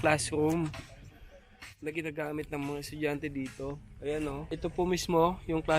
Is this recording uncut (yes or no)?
no